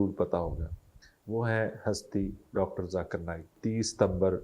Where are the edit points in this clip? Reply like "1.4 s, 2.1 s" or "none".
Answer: 3.5 s